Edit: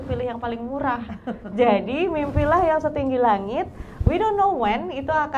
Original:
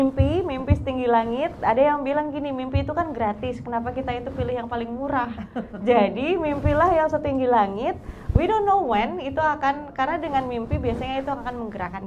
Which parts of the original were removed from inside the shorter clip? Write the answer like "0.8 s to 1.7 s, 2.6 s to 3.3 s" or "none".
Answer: none